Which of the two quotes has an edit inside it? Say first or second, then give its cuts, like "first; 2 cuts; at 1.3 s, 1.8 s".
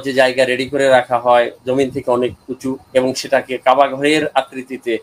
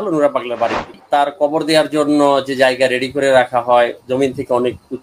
second; 1 cut; at 0.9 s